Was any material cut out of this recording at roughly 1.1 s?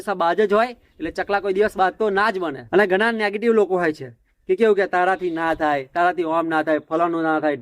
no; 1 cut; at 2.6 s

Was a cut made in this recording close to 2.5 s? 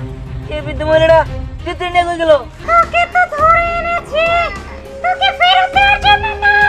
yes; 1 cut; at 2.5 s

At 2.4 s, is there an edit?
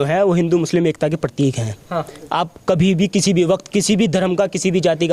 no; 0 cuts

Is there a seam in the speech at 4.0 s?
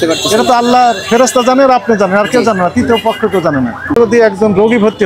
yes; 1 cut; at 4.0 s

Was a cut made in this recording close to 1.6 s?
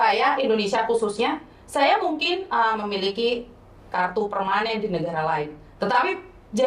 no; 0 cuts

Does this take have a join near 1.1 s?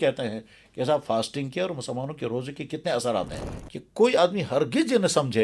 no; 1 cut; at 3.4 s

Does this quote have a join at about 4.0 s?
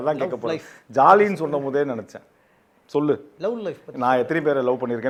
no; 0 cuts

